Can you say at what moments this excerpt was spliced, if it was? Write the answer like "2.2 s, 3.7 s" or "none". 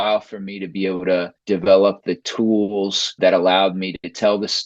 1.3 s, 3.1 s